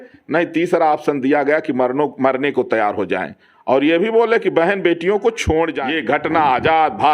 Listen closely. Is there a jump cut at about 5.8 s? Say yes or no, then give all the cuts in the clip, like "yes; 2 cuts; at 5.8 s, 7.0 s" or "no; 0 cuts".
yes; 1 cut; at 5.8 s